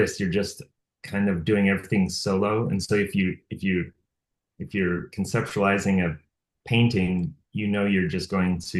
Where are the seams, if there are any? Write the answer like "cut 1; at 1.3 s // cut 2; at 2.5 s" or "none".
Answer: none